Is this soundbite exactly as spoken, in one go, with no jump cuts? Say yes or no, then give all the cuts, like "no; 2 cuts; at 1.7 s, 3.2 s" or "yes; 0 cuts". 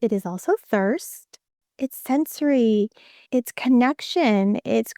no; 1 cut; at 1.6 s